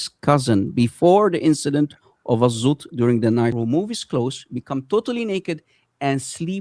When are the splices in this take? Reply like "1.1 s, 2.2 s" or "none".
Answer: 3.5 s